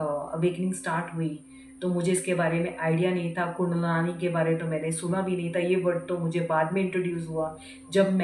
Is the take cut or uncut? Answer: uncut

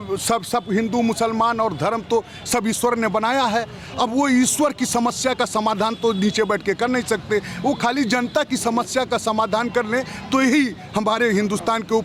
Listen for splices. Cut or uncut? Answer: uncut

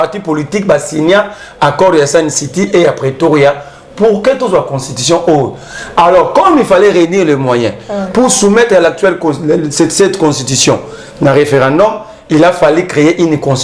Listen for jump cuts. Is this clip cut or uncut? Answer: uncut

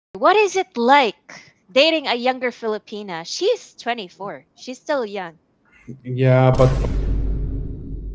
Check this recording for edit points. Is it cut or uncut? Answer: cut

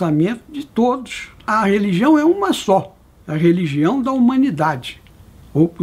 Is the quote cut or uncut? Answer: cut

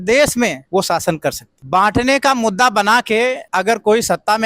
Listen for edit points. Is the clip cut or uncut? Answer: cut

